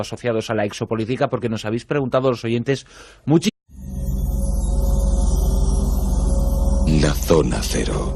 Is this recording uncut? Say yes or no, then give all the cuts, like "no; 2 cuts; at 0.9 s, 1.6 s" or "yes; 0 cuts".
yes; 0 cuts